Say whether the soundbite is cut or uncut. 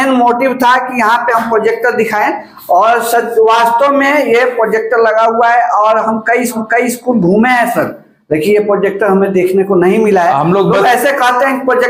uncut